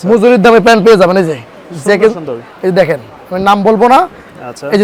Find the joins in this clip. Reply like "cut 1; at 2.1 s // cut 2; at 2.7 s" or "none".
none